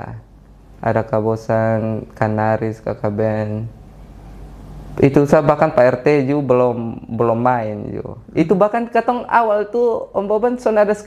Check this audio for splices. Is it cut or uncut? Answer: uncut